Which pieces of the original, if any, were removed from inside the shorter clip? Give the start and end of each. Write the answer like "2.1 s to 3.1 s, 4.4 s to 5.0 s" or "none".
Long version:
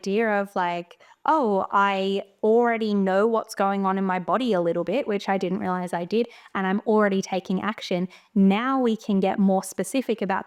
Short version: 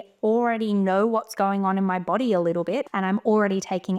5.0 s to 6.5 s